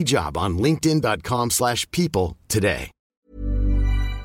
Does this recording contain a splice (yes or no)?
yes